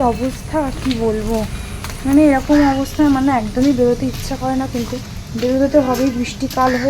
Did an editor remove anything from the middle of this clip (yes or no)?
no